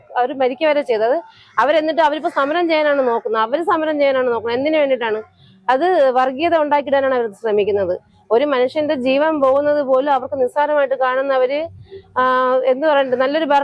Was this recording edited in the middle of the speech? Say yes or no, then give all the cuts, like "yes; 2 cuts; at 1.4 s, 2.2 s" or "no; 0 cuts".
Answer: no; 0 cuts